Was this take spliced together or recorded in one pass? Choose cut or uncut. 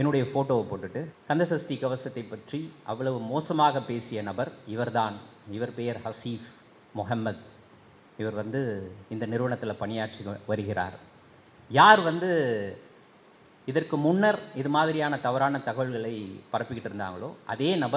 cut